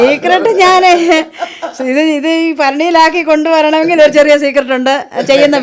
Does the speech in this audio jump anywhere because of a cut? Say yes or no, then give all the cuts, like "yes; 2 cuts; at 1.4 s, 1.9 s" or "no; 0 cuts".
no; 0 cuts